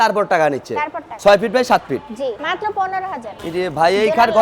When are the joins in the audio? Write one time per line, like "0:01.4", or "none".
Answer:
0:01.0
0:02.4
0:03.4